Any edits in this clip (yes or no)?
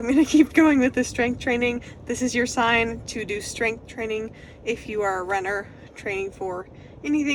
no